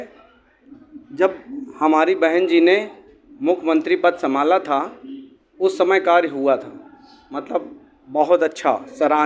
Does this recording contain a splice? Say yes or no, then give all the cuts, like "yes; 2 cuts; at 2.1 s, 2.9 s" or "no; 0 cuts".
no; 0 cuts